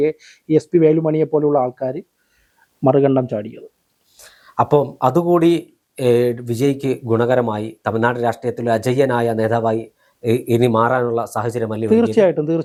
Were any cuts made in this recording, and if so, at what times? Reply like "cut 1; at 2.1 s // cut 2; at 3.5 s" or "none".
none